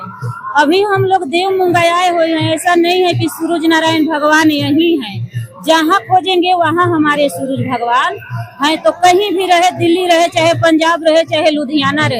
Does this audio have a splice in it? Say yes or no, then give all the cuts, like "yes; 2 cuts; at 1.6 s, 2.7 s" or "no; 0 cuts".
no; 0 cuts